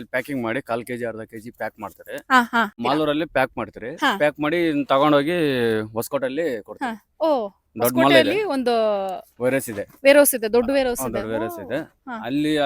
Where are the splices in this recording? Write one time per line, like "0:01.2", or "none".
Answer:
0:02.8